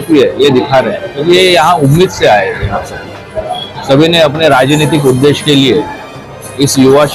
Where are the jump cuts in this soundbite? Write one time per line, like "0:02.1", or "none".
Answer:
0:03.6